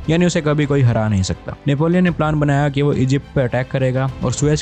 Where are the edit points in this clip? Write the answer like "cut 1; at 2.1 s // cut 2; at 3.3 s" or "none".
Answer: cut 1; at 1.5 s